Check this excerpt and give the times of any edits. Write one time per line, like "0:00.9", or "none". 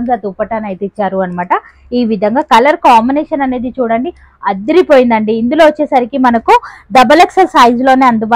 none